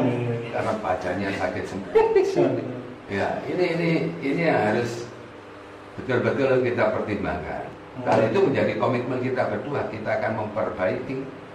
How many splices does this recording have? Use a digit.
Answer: 1